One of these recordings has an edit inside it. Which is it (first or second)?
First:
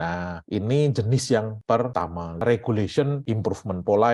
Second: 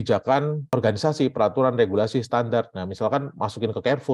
first